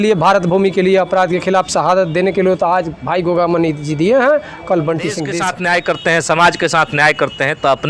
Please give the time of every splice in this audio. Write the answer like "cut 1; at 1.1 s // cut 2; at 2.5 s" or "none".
cut 1; at 5.3 s